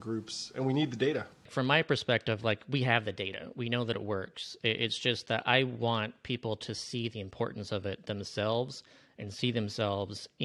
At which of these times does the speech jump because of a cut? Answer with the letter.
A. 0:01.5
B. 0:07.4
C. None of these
A